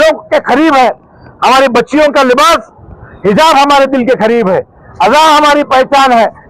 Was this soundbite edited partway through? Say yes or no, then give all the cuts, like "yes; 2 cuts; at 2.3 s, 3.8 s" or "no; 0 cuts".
no; 0 cuts